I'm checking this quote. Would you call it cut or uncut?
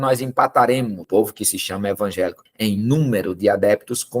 cut